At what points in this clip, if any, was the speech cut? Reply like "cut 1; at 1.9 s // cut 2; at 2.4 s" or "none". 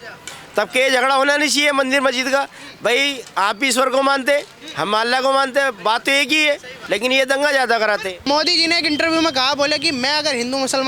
cut 1; at 6.7 s // cut 2; at 8.2 s

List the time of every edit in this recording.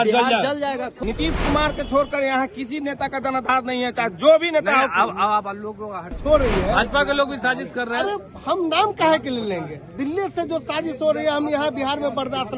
cut 1; at 0.9 s // cut 2; at 6.1 s

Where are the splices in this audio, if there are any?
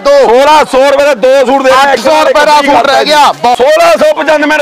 cut 1; at 3.5 s

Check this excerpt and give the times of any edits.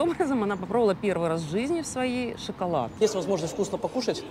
cut 1; at 3.0 s

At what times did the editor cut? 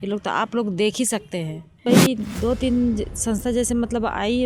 cut 1; at 1.9 s

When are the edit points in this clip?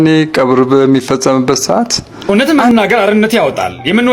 cut 1; at 2.1 s

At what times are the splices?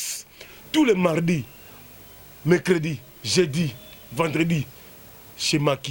none

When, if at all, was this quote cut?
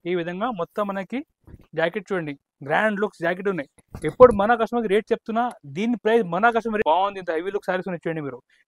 cut 1; at 6.8 s

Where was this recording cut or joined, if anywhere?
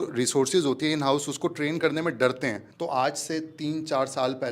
cut 1; at 2.7 s

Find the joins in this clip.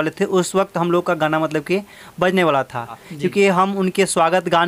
cut 1; at 3.1 s

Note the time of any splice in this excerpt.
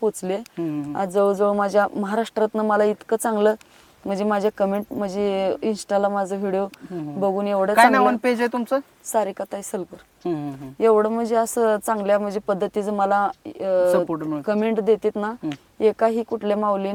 none

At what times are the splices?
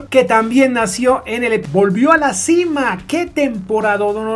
cut 1; at 1.7 s

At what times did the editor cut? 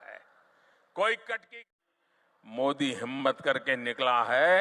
cut 1; at 1.7 s

